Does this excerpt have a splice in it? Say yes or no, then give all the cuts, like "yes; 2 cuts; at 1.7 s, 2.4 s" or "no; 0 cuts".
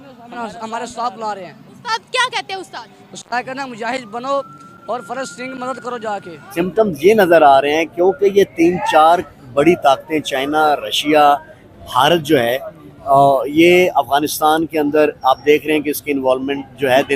yes; 1 cut; at 6.5 s